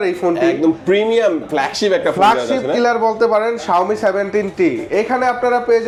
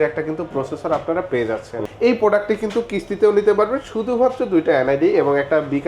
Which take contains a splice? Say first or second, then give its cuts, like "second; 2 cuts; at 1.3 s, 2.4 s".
second; 1 cut; at 1.8 s